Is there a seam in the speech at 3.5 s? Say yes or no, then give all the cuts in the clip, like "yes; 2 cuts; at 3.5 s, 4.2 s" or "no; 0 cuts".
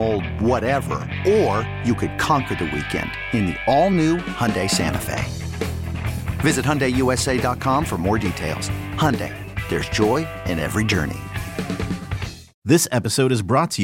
no; 1 cut; at 12.5 s